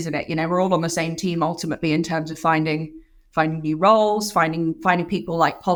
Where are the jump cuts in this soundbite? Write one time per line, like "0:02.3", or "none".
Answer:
none